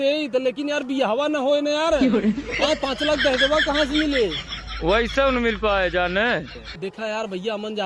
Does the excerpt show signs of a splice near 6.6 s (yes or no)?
yes